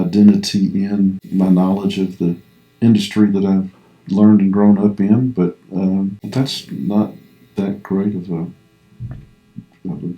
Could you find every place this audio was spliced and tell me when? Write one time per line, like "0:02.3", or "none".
0:01.2
0:06.2